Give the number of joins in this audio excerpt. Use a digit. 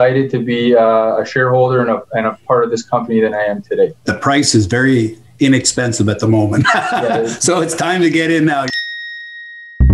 2